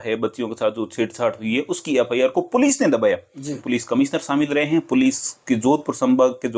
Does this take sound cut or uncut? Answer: cut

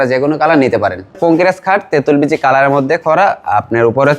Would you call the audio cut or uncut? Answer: cut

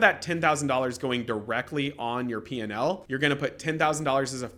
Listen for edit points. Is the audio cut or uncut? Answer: uncut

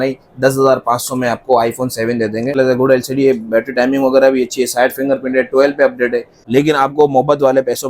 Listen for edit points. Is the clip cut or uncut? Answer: cut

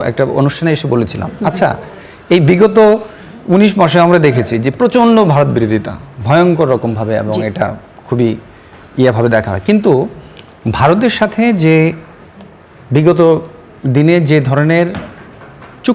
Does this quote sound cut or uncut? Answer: uncut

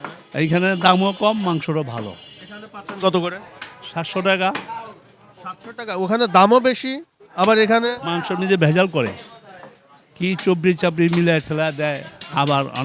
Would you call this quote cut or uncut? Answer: uncut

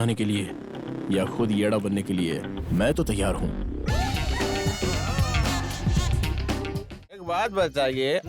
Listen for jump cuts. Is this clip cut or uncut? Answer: cut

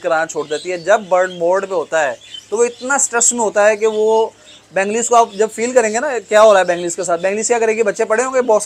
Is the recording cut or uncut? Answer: uncut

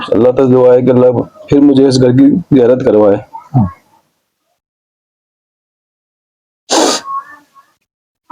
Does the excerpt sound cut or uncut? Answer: uncut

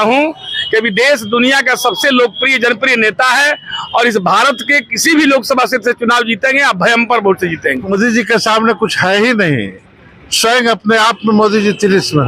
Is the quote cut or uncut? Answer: cut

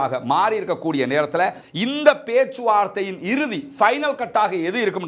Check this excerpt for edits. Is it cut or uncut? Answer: cut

